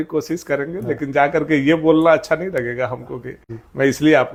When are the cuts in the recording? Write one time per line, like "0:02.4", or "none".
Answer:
none